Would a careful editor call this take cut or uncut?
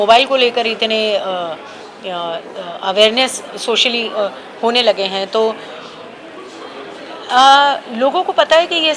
uncut